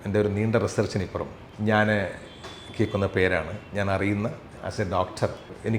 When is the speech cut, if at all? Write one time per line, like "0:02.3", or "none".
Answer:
none

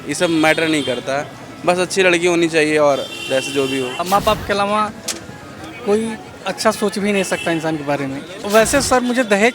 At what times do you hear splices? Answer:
0:04.0
0:08.3

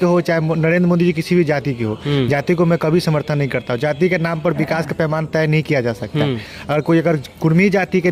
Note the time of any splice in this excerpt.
none

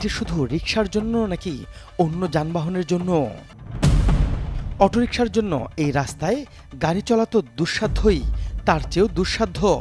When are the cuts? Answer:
0:03.5

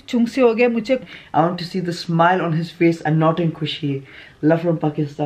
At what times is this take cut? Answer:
0:01.0
0:04.2

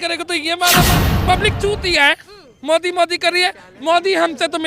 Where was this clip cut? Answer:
0:01.0

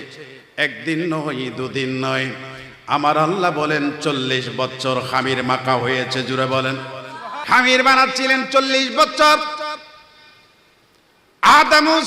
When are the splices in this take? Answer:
0:07.3

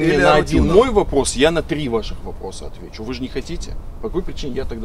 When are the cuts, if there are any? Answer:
none

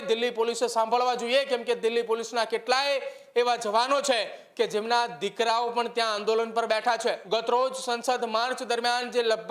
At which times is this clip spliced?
0:07.2

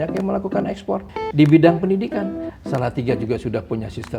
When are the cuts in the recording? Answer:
0:01.2

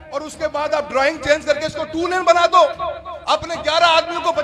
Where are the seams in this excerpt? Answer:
none

